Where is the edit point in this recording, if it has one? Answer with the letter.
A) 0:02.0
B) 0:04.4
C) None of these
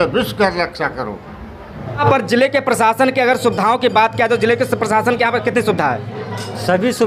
A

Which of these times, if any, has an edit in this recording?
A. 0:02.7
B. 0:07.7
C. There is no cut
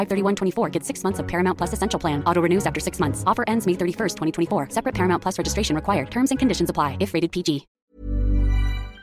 B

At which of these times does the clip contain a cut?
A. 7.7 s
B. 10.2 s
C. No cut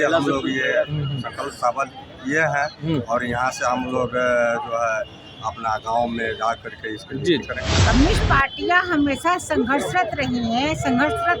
A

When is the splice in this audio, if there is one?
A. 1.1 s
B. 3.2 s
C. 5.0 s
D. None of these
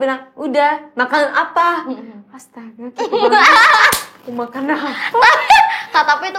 D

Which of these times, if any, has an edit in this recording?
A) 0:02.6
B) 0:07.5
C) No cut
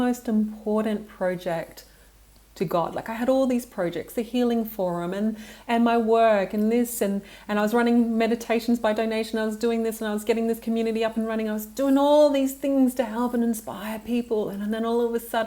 C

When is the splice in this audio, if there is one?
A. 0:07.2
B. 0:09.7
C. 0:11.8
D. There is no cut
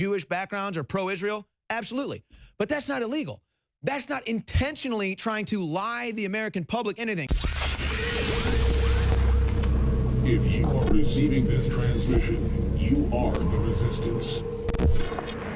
A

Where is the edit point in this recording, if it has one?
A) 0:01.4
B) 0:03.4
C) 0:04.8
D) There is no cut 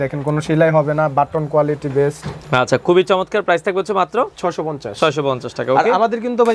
D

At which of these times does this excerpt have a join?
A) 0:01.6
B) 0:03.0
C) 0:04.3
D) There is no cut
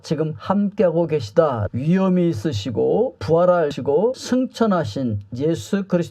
A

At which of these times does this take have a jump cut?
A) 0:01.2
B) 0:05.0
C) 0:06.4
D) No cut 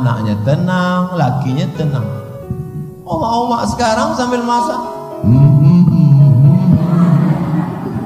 D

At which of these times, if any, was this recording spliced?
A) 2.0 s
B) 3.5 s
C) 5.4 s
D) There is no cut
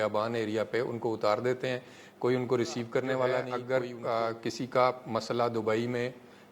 B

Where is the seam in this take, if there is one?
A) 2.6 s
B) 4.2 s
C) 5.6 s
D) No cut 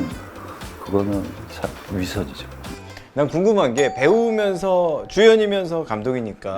A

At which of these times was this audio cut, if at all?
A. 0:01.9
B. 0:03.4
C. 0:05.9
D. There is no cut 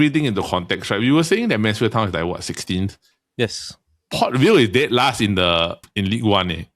C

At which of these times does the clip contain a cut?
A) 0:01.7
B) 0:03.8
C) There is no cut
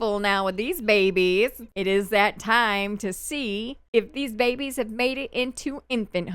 A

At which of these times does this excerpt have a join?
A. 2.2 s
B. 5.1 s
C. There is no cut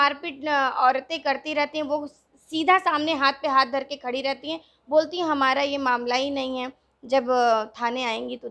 C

